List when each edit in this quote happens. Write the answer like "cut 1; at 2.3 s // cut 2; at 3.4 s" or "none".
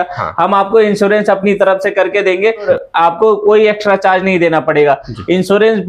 cut 1; at 2.7 s